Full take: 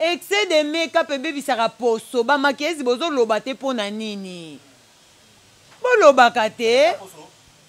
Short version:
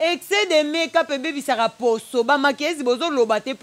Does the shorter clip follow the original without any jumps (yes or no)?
yes